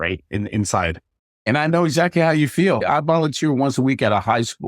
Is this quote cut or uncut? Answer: cut